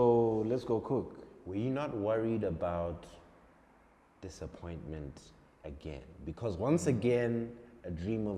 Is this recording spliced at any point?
no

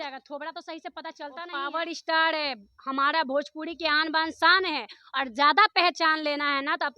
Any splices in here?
yes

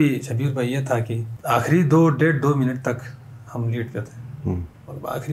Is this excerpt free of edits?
no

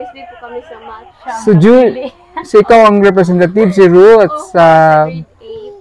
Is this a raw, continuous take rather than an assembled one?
yes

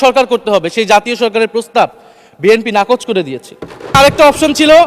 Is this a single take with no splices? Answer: no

